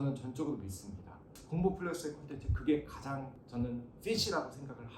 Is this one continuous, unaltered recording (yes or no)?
no